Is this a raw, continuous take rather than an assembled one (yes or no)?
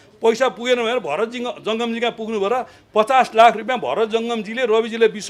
yes